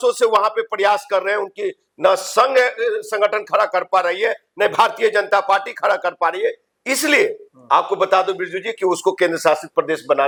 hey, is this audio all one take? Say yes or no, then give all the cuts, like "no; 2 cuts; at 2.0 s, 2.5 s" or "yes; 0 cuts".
yes; 0 cuts